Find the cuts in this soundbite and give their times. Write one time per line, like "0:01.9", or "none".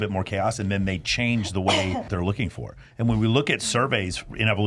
0:02.1